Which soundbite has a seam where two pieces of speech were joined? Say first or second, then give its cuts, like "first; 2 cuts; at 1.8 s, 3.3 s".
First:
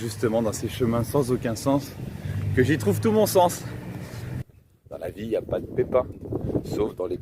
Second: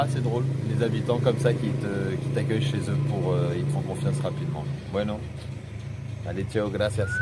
first; 1 cut; at 4.2 s